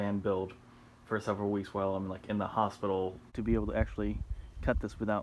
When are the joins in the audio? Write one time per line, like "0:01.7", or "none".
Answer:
0:03.3